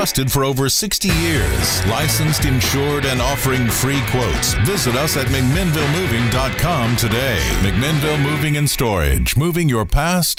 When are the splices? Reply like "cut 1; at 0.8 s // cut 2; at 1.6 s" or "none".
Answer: none